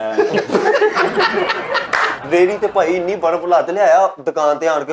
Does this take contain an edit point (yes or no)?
yes